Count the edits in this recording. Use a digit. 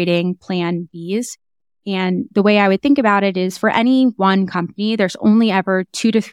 1